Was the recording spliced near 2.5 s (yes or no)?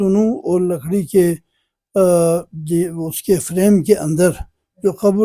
no